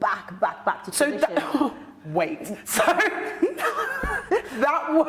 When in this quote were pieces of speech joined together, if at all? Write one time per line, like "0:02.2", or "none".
none